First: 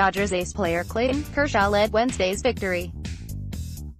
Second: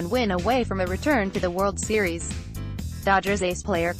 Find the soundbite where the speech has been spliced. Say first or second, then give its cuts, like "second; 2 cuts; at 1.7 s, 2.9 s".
first; 1 cut; at 2.9 s